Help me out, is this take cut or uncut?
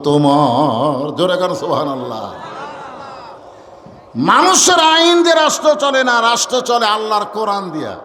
uncut